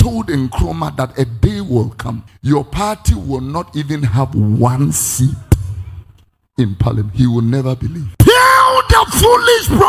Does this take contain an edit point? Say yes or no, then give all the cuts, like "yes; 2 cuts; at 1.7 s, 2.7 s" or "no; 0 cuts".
yes; 2 cuts; at 2.3 s, 8.0 s